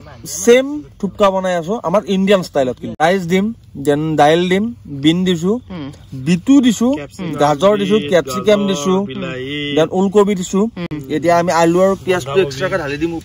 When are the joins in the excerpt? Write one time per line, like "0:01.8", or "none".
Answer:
0:03.0